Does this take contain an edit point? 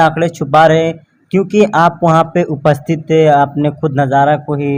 no; 0 cuts

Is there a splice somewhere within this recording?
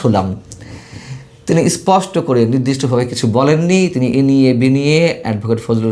no; 0 cuts

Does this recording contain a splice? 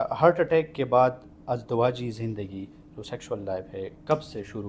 no; 0 cuts

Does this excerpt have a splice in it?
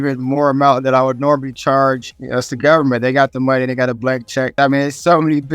yes; 2 cuts; at 2.1 s, 4.5 s

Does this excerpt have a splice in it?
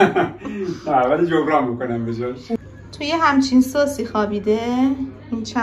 yes; 1 cut; at 2.6 s

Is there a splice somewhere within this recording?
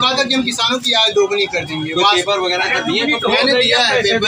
no; 0 cuts

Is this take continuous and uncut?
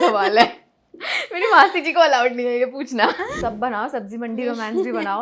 no; 1 cut; at 3.3 s

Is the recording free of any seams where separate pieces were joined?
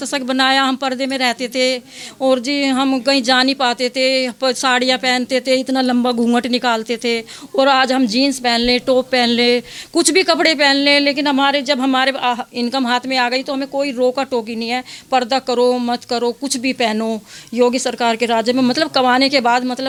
yes; 0 cuts

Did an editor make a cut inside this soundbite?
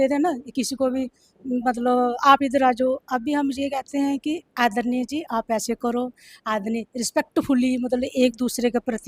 no; 0 cuts

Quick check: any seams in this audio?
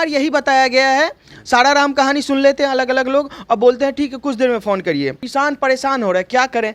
yes; 1 cut; at 5.2 s

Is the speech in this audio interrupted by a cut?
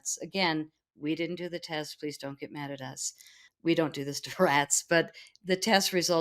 yes; 1 cut; at 3.4 s

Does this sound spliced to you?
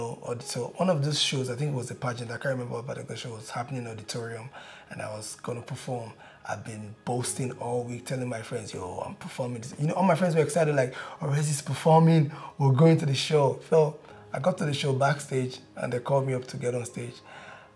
no; 0 cuts

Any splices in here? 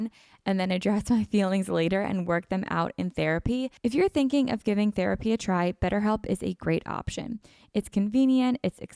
yes; 1 cut; at 3.7 s

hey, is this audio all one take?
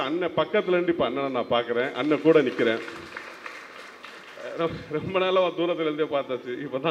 yes; 0 cuts

